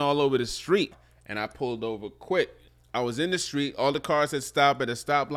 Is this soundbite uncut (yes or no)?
no